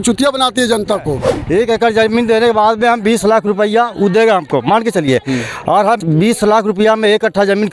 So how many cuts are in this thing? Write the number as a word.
two